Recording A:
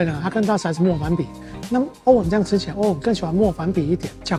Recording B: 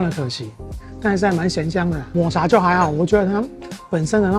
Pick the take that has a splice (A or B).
B